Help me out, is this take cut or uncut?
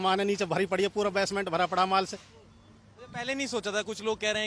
uncut